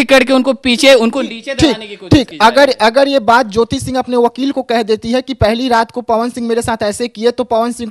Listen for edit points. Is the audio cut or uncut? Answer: uncut